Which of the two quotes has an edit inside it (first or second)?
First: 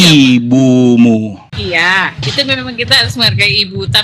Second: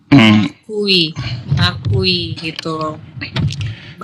first